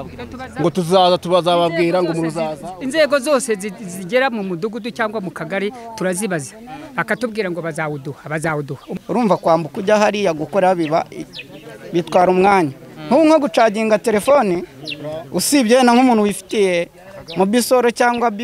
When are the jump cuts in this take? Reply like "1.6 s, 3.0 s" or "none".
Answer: 8.8 s